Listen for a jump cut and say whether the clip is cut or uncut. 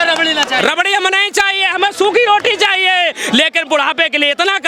uncut